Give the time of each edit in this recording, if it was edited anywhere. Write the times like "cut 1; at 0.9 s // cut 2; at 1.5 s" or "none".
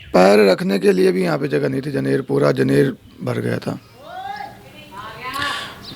none

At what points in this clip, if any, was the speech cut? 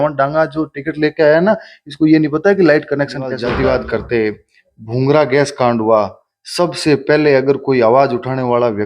cut 1; at 3.4 s

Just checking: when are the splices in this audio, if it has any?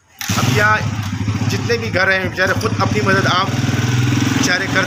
none

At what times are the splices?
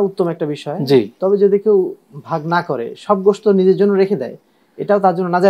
none

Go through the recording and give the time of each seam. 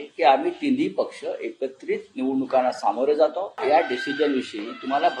cut 1; at 3.6 s

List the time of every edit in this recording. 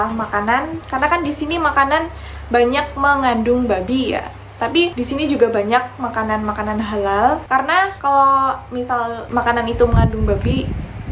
none

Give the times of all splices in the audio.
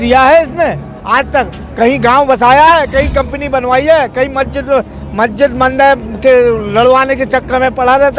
none

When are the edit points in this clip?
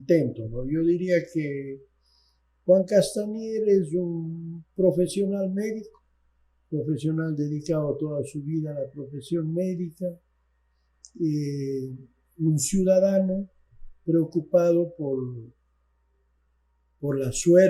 none

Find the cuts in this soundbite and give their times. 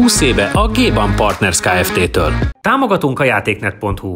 cut 1; at 2.5 s

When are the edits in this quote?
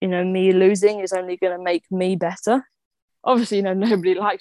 cut 1; at 2.9 s

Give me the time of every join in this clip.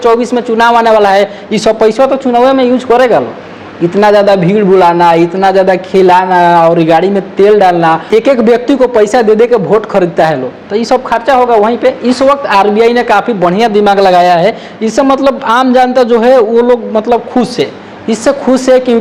none

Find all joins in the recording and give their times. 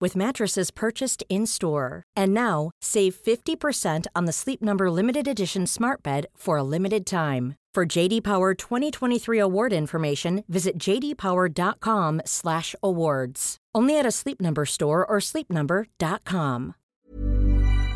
cut 1; at 16.8 s

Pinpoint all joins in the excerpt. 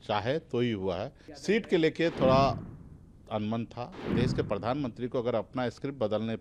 cut 1; at 1.2 s // cut 2; at 4.1 s

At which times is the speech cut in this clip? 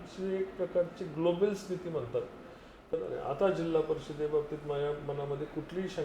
cut 1; at 3.0 s

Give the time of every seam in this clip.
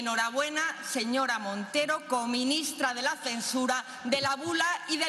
none

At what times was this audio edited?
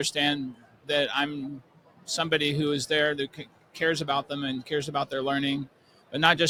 none

